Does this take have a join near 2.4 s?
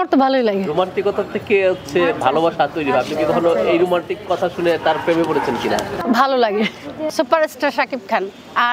no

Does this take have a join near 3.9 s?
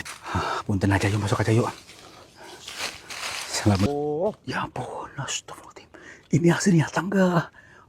yes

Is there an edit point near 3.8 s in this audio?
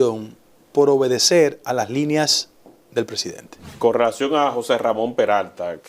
yes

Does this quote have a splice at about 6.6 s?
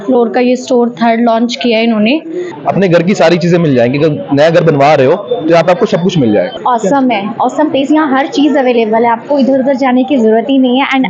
yes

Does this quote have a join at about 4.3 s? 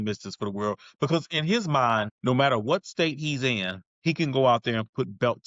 no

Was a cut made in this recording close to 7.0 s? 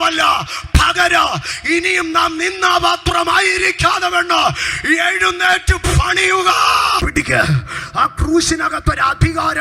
yes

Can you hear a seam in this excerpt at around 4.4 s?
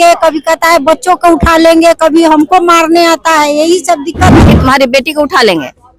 yes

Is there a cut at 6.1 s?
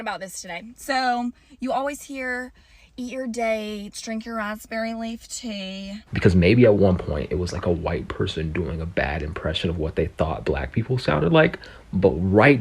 yes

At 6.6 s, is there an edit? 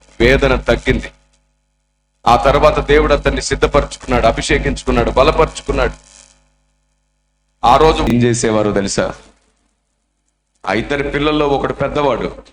no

